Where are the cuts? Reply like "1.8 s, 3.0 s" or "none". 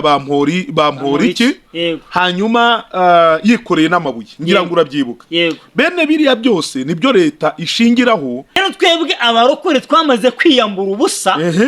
8.6 s